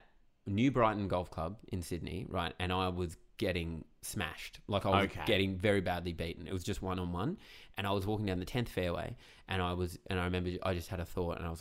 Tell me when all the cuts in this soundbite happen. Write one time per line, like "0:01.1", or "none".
none